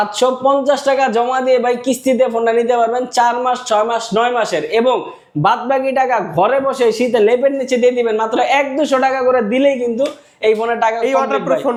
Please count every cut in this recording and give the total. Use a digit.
0